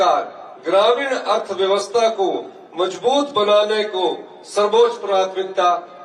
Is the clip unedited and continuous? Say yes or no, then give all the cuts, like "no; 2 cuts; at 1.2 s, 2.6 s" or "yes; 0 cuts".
yes; 0 cuts